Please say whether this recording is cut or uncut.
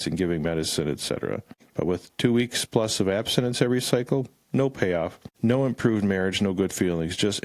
cut